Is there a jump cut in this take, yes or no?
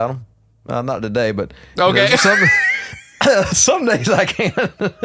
no